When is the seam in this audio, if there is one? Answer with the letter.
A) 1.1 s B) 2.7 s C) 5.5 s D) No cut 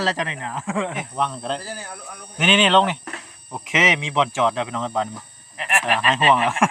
A